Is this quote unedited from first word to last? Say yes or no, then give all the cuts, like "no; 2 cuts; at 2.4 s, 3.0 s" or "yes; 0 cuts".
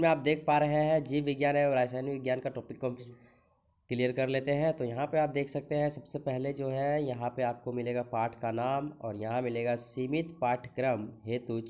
no; 1 cut; at 3.2 s